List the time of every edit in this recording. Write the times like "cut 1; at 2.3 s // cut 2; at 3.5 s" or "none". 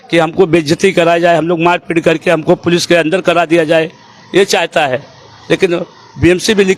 none